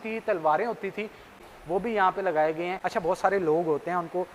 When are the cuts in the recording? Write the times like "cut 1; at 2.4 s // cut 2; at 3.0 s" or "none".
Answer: cut 1; at 1.3 s // cut 2; at 2.8 s